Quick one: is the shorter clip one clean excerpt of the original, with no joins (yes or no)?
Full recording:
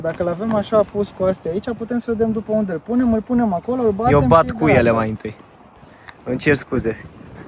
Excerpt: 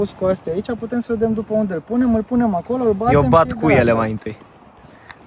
yes